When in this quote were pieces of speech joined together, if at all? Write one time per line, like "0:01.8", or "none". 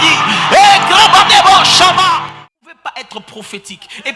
0:02.2